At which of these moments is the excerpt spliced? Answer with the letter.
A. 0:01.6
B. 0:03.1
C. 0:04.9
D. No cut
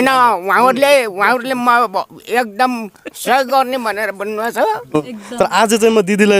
C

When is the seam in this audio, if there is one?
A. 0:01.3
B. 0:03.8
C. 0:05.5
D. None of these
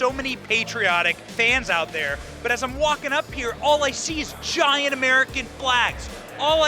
A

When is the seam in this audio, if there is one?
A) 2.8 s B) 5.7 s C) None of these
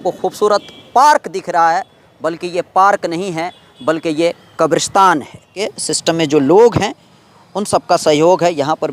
B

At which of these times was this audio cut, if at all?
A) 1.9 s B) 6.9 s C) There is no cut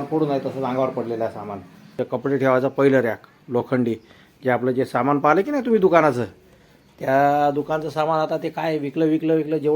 A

